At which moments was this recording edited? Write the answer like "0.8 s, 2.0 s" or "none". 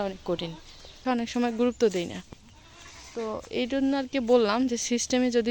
1.0 s